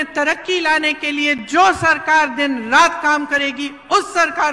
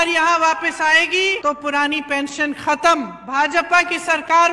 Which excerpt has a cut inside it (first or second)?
second